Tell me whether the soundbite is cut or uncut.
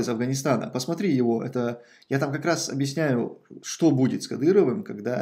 uncut